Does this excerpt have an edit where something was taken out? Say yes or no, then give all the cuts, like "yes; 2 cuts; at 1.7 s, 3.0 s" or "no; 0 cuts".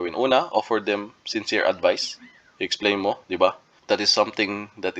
yes; 1 cut; at 3.7 s